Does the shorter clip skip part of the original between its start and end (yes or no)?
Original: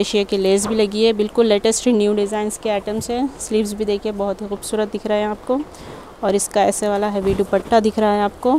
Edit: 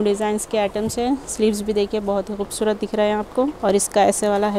yes